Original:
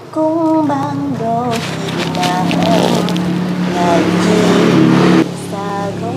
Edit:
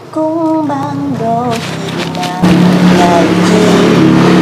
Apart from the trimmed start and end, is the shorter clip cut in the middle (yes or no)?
yes